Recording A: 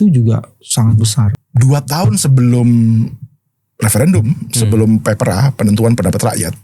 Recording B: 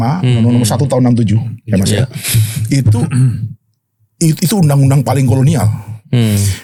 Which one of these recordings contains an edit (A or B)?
A